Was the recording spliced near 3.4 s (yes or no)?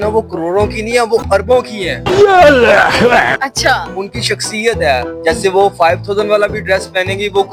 no